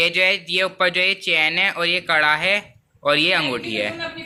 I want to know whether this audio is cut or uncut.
uncut